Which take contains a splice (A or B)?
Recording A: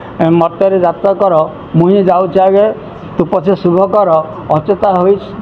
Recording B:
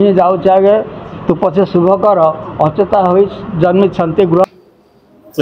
B